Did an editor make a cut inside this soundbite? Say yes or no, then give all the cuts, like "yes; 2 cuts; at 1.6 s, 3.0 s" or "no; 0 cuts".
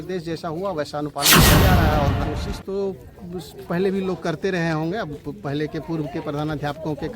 yes; 1 cut; at 2.3 s